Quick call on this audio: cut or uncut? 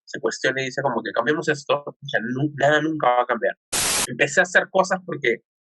cut